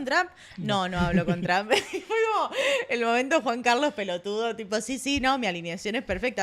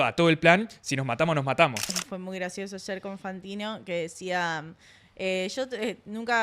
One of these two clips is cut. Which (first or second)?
second